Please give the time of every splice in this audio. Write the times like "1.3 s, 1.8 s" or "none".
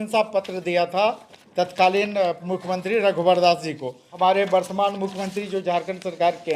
4.0 s